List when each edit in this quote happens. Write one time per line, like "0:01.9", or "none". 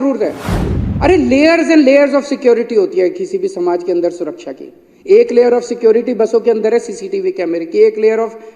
none